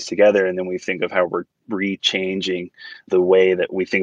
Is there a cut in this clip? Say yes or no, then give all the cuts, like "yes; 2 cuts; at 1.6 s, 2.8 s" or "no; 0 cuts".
no; 0 cuts